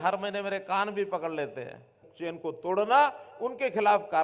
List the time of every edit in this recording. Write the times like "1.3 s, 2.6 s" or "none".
2.1 s